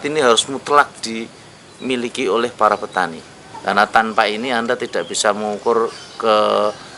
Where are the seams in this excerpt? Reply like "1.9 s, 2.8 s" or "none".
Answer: 3.3 s

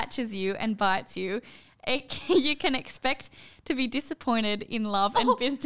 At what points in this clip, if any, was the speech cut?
none

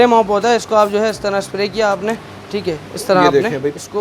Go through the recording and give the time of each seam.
none

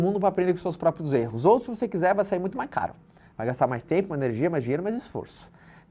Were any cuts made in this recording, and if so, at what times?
none

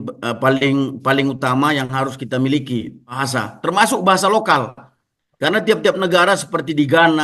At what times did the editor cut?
3.2 s

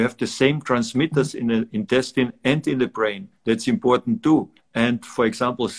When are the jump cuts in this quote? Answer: 3.3 s, 4.6 s

